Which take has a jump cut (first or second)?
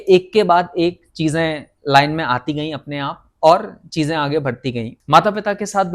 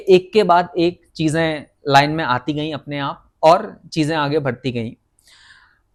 first